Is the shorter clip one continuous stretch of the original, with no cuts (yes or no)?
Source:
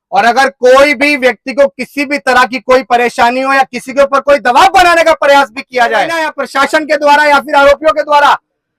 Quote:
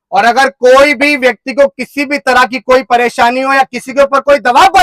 yes